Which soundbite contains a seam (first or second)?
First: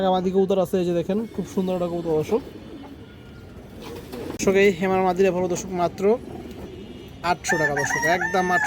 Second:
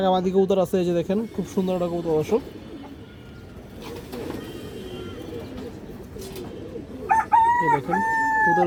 first